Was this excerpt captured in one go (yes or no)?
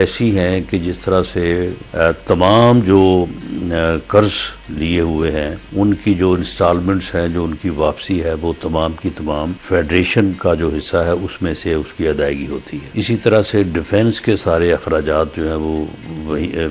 no